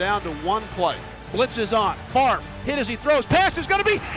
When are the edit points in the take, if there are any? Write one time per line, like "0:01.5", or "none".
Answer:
0:01.2